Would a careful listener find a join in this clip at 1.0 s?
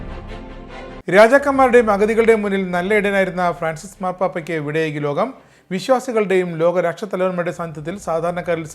yes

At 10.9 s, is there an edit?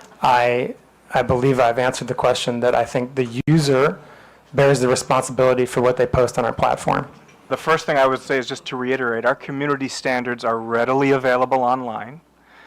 no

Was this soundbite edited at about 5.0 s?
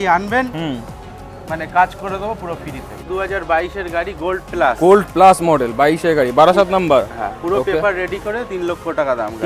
no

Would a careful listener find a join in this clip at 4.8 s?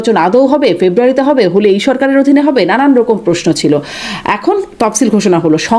no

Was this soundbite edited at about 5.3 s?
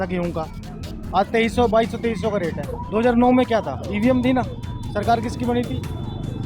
no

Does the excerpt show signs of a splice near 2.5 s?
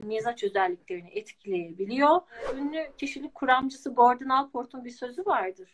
yes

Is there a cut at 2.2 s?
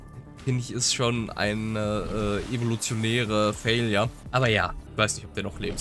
no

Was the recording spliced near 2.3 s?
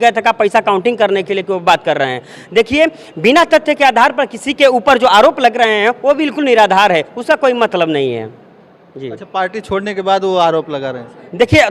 no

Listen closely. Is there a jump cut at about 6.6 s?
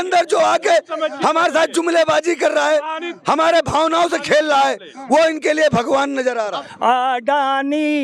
yes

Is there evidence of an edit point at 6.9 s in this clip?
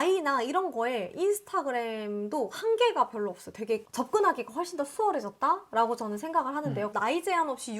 yes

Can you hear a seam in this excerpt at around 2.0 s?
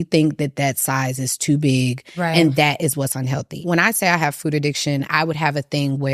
no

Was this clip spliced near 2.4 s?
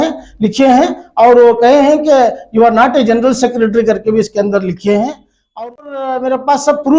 no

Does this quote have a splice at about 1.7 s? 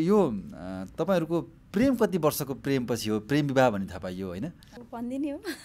no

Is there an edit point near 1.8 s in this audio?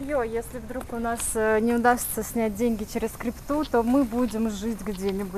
no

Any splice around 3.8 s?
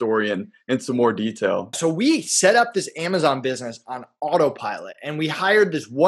no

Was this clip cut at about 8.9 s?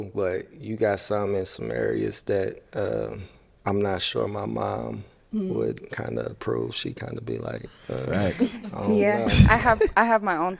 no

